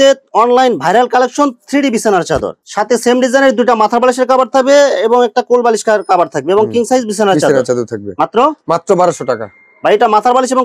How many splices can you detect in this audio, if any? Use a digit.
0